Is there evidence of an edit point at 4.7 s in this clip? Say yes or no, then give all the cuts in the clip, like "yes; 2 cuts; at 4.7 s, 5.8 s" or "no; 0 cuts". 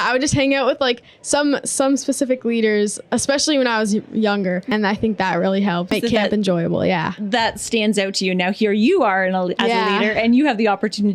yes; 2 cuts; at 4.7 s, 5.9 s